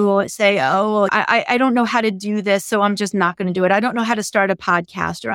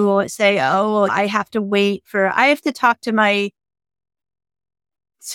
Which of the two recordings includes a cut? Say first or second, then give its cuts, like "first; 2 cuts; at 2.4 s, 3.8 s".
first; 1 cut; at 1.1 s